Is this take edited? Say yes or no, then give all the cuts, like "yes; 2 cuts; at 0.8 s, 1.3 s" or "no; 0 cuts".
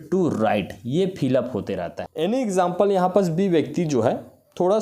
yes; 1 cut; at 2.1 s